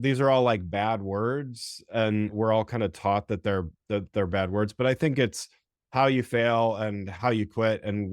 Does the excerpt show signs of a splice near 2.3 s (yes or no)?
yes